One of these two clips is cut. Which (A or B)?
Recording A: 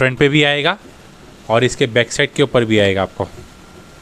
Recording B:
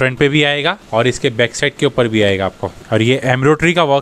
B